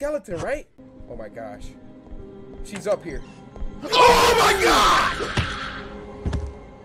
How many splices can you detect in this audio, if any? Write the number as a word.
zero